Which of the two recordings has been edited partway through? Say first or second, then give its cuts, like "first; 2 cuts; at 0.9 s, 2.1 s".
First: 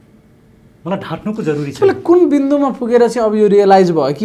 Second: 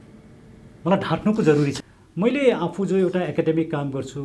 second; 1 cut; at 1.7 s